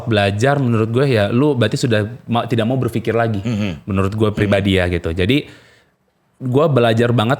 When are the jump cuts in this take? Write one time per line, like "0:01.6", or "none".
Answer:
none